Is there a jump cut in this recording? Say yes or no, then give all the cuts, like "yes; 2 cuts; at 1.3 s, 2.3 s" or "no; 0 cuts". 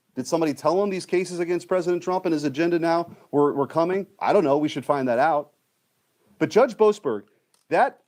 no; 0 cuts